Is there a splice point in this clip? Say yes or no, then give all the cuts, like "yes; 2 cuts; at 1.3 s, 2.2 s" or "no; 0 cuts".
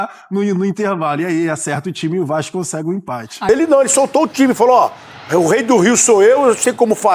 yes; 1 cut; at 3.5 s